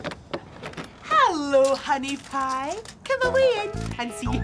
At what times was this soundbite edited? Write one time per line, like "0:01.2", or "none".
0:00.9